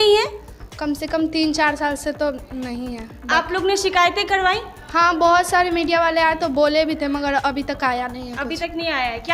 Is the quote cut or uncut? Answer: uncut